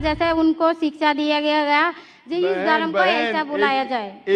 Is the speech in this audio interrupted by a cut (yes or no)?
no